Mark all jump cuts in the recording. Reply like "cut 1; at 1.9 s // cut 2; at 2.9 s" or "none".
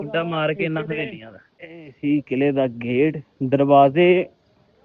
cut 1; at 1.5 s